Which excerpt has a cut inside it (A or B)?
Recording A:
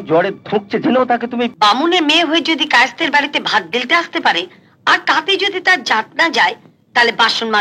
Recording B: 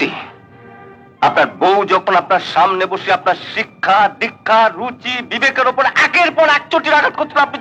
A